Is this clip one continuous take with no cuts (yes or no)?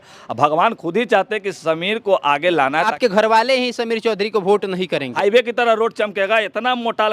no